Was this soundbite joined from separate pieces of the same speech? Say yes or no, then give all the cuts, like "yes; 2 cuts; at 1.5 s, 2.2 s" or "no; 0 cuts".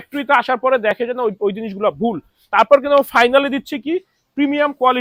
no; 0 cuts